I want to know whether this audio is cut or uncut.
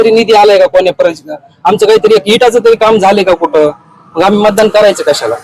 uncut